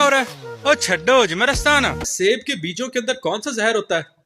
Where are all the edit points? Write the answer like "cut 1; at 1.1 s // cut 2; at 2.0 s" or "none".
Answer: cut 1; at 2.1 s